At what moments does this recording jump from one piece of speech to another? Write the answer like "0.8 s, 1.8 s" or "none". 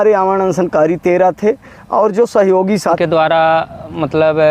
3.0 s